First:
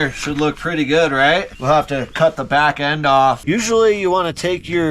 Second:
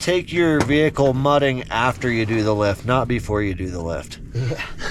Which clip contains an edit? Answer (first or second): first